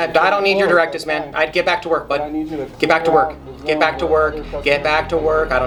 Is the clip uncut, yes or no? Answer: yes